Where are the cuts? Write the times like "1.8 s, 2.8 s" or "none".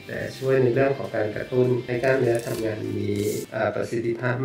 1.9 s, 3.5 s